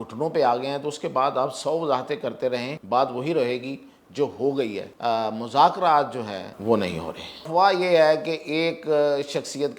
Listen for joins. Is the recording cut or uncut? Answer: cut